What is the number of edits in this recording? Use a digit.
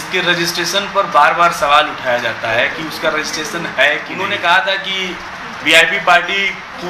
1